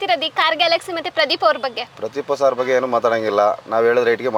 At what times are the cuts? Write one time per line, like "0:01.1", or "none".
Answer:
none